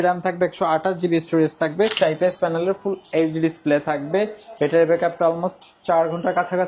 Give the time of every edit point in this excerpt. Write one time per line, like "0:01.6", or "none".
0:01.9